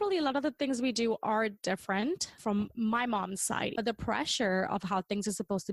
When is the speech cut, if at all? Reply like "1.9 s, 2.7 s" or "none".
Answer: 2.4 s, 3.7 s